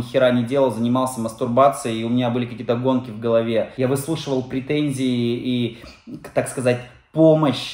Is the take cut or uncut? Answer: cut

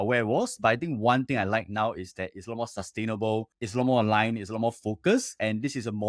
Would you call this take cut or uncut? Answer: uncut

